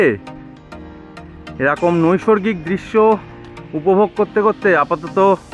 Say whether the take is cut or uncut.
uncut